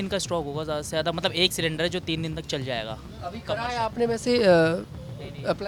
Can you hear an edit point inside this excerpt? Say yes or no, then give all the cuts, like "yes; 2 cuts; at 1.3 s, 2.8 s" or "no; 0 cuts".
no; 0 cuts